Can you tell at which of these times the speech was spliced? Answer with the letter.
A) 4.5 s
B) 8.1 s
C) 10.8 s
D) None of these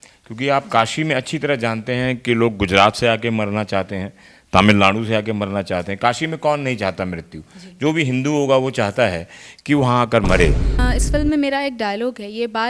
C